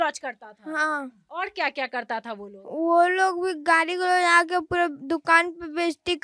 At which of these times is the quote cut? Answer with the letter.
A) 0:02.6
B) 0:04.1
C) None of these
C